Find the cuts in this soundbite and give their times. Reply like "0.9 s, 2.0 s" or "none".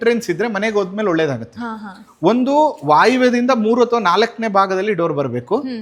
none